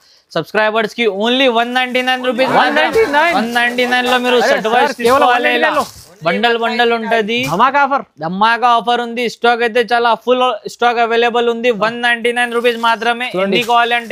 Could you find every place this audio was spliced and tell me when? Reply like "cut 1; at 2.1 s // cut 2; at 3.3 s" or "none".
none